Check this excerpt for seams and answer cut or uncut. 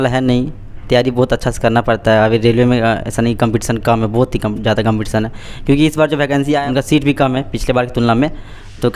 cut